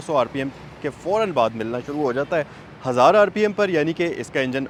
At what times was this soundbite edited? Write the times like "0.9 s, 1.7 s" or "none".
none